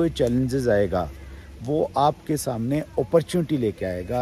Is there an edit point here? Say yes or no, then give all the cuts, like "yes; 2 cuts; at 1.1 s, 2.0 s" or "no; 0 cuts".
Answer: no; 0 cuts